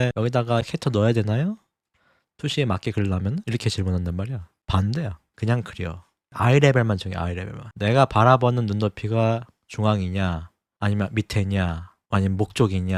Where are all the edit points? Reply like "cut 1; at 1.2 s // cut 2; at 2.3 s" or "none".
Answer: none